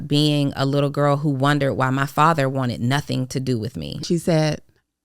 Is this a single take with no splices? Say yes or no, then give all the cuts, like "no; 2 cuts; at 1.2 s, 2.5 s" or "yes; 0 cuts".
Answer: no; 1 cut; at 4.0 s